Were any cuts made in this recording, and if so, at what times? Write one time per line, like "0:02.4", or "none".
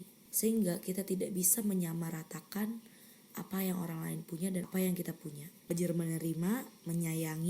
0:04.7
0:05.7